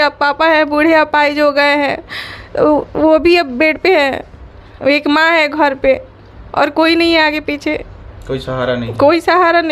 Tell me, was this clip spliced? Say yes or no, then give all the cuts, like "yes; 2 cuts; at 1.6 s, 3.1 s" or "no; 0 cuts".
no; 0 cuts